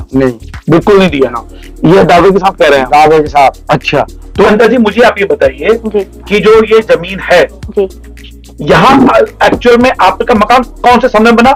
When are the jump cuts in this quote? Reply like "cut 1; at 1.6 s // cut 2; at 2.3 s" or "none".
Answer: none